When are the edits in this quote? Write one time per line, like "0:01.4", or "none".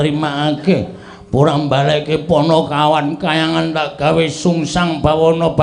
none